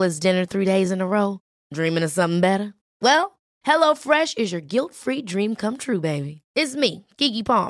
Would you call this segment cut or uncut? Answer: uncut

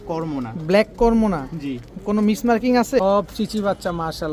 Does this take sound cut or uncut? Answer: cut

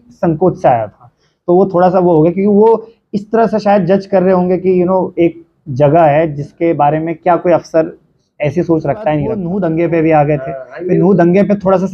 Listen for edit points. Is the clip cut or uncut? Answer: cut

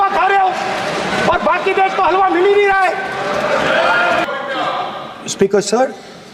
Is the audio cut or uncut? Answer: cut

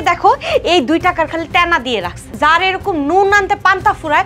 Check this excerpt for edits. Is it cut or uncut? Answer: cut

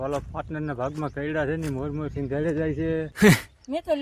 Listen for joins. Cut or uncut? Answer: cut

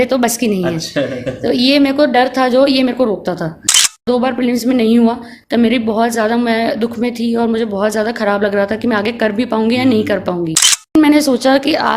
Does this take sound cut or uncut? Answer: cut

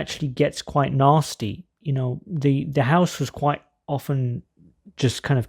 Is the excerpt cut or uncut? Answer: uncut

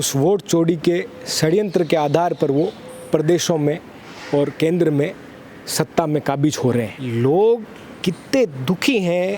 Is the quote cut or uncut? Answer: cut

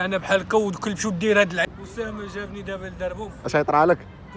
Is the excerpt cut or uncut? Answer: cut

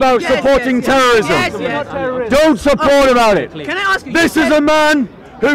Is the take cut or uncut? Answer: uncut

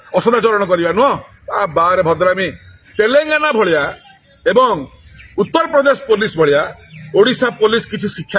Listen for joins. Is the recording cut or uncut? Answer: uncut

